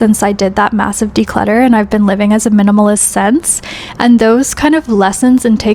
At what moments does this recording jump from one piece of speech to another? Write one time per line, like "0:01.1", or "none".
none